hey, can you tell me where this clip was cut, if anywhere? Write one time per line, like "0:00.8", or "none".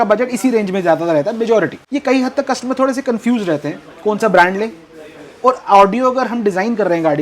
0:01.8